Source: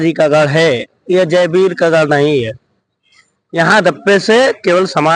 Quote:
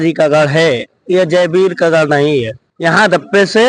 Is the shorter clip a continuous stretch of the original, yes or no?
no